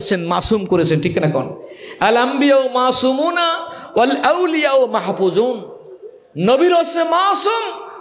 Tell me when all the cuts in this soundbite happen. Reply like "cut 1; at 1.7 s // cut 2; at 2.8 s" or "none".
none